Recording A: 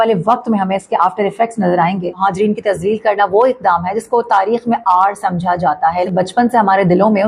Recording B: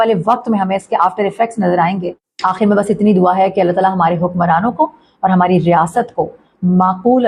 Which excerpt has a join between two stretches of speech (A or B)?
A